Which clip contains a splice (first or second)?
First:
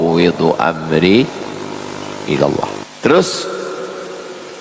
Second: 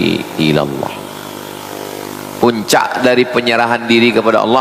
first